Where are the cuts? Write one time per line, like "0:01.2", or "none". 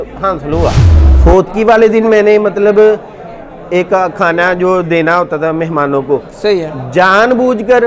0:00.9